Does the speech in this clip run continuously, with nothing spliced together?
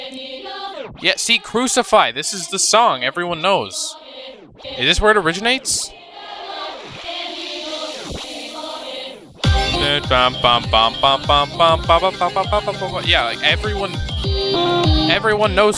yes; 0 cuts

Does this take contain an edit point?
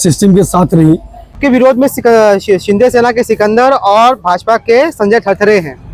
yes; 1 cut; at 1.4 s

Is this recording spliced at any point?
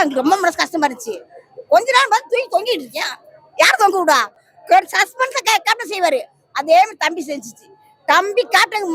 no; 0 cuts

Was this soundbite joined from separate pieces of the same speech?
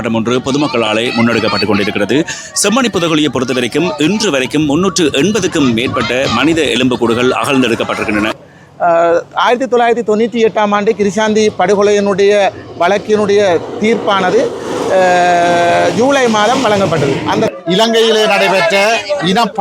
yes; 2 cuts; at 8.4 s, 17.5 s

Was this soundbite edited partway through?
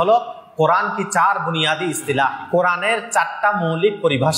yes; 1 cut; at 2.4 s

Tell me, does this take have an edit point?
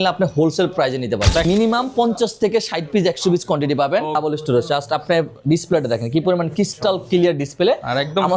yes; 2 cuts; at 1.4 s, 4.2 s

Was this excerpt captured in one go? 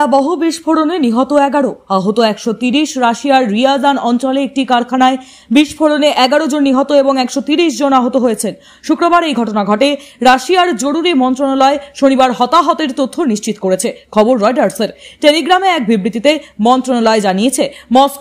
yes; 0 cuts

